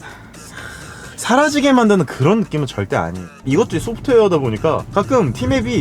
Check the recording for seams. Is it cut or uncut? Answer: cut